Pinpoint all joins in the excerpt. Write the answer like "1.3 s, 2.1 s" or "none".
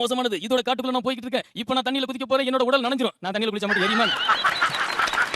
none